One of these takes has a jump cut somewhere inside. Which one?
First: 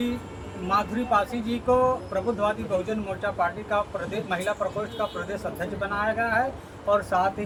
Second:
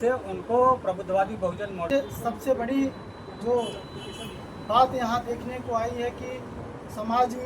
second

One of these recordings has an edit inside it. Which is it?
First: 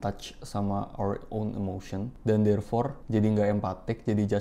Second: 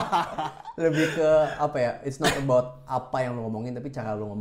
first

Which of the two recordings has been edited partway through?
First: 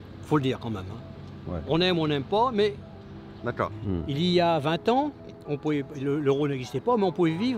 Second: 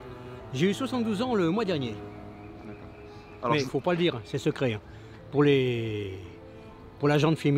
first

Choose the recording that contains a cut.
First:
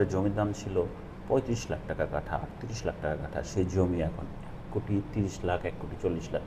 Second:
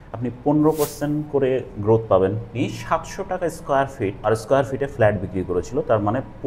second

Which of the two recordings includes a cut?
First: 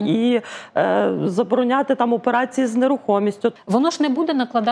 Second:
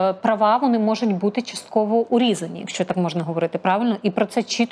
first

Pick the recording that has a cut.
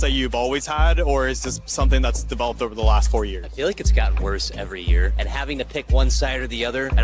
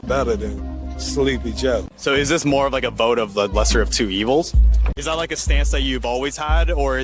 second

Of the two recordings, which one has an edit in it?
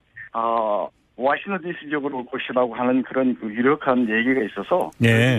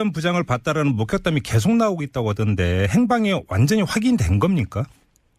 second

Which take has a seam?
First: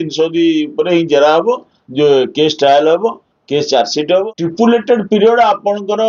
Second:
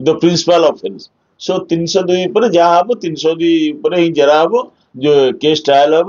first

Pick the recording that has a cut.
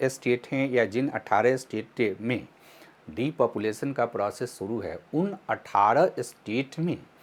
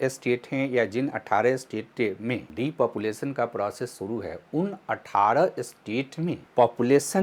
second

